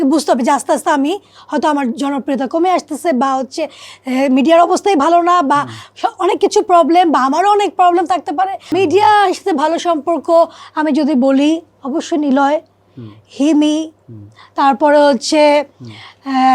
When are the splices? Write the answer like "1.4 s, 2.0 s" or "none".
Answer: 8.6 s